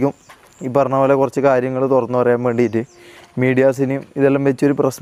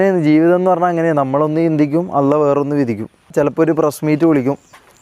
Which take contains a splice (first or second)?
second